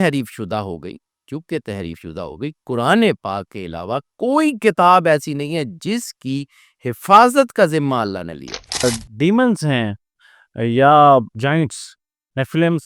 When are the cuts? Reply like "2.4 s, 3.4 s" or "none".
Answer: 8.8 s